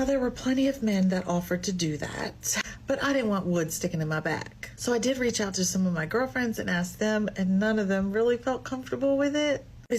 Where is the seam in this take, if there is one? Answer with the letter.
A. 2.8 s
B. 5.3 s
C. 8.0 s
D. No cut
D